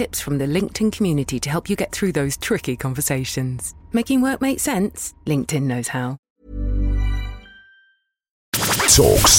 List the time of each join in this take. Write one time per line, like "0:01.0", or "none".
0:06.2
0:08.5